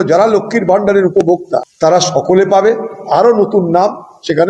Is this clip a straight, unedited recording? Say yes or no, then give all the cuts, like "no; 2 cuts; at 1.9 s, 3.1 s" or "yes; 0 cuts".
yes; 0 cuts